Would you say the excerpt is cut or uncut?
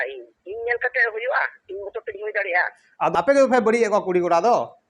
cut